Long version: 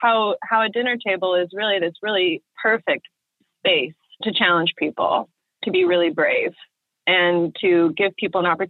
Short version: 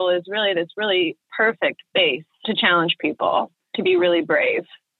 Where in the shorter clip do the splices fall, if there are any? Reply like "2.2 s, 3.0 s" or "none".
2.2 s, 3.6 s